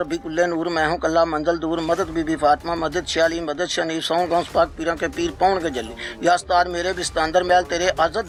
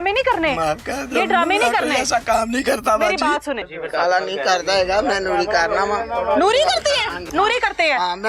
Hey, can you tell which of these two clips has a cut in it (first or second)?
second